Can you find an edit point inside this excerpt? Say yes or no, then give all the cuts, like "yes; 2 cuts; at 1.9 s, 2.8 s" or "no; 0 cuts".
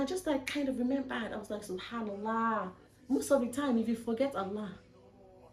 no; 0 cuts